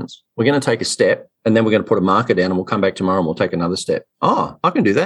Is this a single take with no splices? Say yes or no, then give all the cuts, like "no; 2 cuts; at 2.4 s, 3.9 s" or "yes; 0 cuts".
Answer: yes; 0 cuts